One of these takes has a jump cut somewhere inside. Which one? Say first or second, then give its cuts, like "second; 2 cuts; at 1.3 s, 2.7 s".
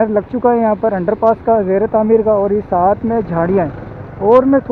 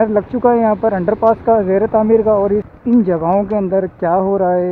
second; 1 cut; at 2.7 s